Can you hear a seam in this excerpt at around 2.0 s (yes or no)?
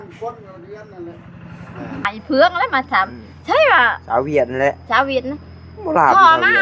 yes